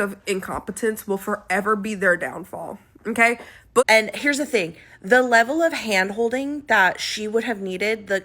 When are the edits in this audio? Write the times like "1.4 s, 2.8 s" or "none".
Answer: 3.8 s